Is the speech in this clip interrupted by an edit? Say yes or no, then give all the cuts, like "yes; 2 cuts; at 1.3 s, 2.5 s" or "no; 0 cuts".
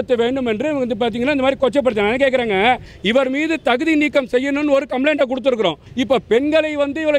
yes; 2 cuts; at 2.9 s, 5.8 s